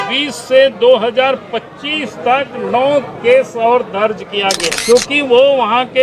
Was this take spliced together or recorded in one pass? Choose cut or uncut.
cut